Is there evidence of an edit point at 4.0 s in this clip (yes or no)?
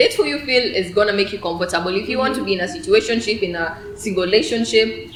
no